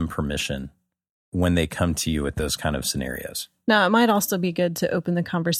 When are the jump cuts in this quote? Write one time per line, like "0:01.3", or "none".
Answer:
0:01.2

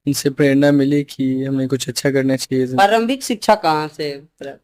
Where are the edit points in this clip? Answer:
none

